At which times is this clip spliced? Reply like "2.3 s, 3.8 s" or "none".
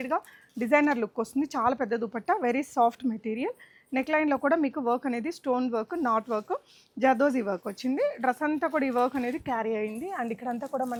none

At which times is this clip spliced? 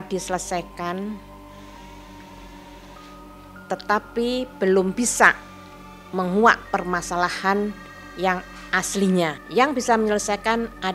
9.4 s

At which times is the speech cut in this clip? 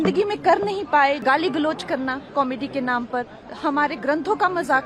1.2 s

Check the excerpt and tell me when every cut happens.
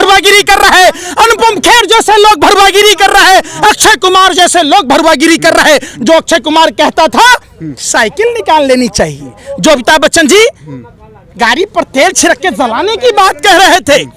none

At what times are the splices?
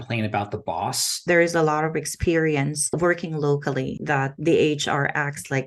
1.2 s, 2.9 s, 4.0 s

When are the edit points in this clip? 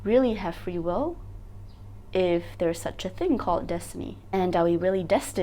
4.2 s

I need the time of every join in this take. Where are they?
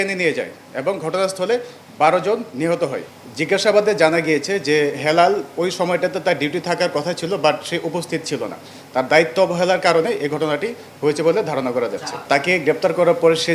3.1 s

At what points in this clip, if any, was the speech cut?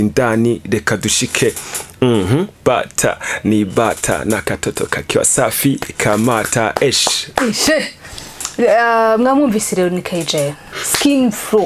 none

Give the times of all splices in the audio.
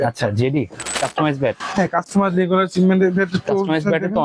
0.9 s

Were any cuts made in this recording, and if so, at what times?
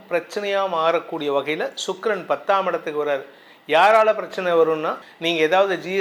5.0 s

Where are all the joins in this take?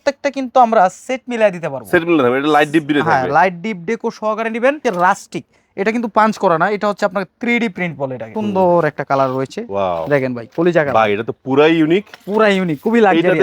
4.8 s, 8.3 s

